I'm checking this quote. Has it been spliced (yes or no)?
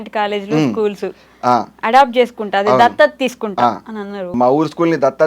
yes